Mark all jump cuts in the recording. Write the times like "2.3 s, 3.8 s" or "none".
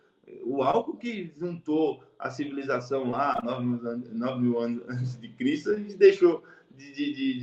none